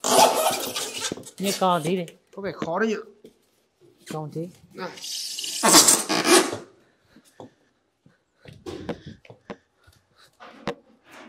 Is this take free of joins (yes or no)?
yes